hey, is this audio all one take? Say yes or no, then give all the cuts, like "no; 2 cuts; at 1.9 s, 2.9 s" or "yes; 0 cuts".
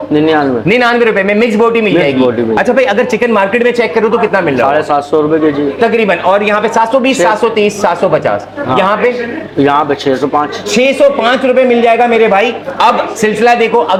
yes; 0 cuts